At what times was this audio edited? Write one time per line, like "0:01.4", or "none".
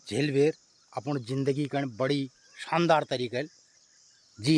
none